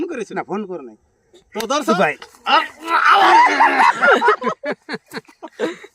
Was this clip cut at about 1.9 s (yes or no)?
yes